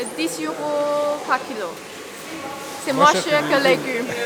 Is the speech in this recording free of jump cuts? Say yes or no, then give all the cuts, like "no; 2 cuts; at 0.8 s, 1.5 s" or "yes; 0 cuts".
yes; 0 cuts